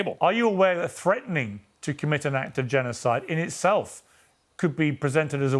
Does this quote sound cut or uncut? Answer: uncut